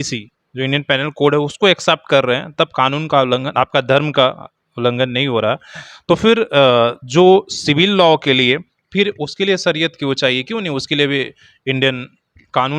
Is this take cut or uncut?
uncut